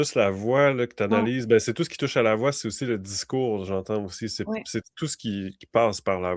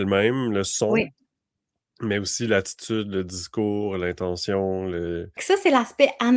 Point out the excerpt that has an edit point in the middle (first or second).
second